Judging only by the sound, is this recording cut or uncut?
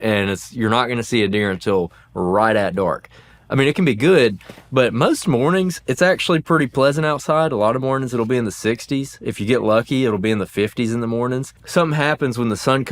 cut